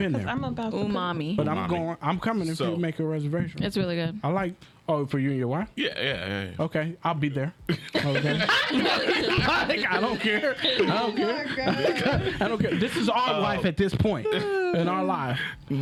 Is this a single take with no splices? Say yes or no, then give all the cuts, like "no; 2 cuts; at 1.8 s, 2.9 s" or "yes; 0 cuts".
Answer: yes; 0 cuts